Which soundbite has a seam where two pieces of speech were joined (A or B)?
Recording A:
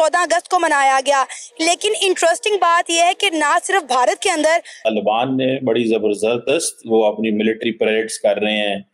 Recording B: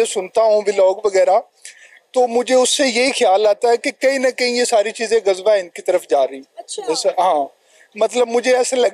A